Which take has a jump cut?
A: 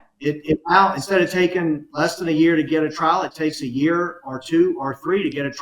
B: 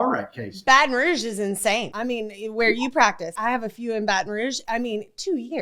B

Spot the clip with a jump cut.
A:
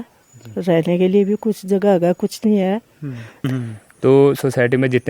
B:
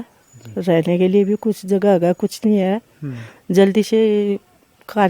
A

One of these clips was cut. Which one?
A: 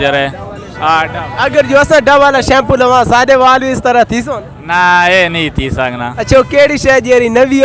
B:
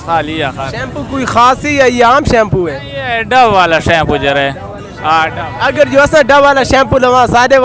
A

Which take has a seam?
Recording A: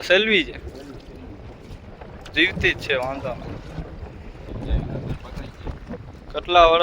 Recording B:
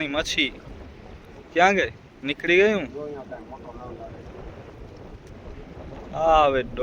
A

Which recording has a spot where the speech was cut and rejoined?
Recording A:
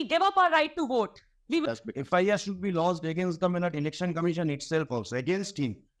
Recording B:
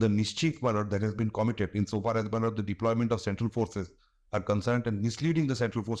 A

